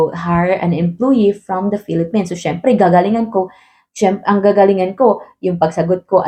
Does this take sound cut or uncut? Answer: uncut